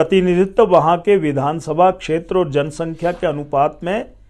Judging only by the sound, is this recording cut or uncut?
uncut